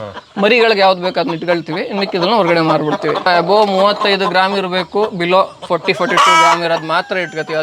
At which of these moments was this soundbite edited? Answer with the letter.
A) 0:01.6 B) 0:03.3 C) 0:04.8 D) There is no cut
B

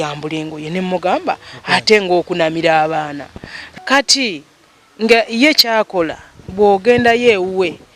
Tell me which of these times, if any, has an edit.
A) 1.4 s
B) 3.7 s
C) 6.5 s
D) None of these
B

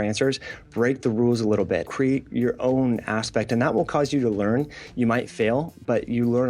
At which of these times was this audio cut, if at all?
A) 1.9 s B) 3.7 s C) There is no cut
A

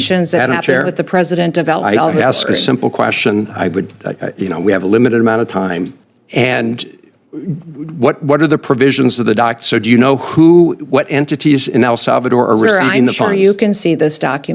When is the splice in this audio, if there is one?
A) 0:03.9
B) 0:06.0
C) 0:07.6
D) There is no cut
B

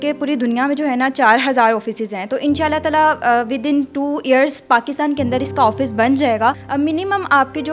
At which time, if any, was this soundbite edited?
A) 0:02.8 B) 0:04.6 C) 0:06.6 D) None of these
C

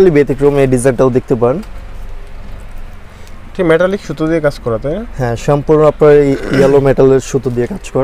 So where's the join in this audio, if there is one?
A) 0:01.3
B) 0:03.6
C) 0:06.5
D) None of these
D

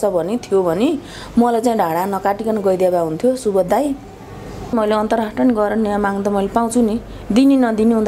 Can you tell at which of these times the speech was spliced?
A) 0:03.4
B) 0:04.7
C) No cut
B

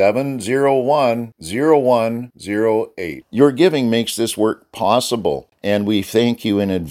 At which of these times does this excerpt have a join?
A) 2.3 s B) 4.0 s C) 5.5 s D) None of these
C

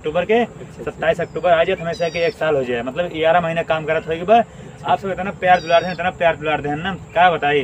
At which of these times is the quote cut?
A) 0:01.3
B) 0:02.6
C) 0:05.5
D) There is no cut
D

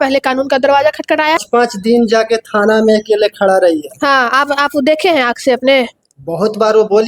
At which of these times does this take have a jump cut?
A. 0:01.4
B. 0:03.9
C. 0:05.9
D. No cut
A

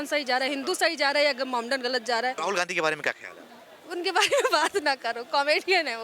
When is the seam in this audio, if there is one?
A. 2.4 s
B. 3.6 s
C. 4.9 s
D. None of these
A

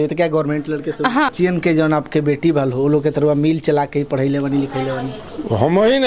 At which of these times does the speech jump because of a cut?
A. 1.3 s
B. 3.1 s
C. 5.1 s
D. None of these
A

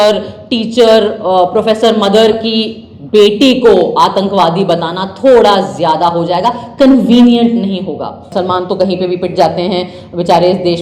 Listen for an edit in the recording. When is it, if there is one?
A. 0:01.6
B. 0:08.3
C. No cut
B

